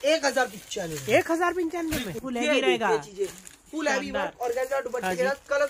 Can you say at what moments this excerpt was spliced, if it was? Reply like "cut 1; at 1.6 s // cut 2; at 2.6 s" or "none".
cut 1; at 2.2 s